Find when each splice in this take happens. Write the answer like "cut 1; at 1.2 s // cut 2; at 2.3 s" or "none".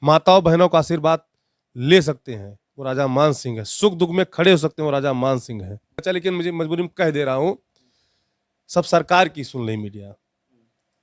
cut 1; at 6.0 s